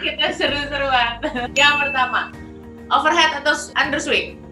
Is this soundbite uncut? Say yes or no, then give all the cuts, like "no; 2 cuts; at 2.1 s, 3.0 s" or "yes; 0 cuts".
no; 1 cut; at 1.5 s